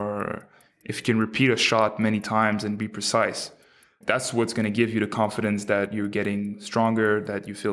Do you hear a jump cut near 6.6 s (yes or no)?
no